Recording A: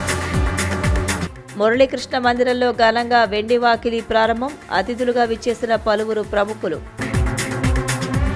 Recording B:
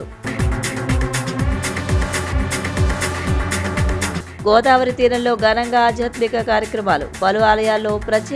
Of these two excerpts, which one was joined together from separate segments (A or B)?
A